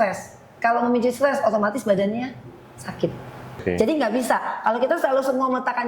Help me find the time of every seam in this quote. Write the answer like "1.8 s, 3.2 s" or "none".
3.6 s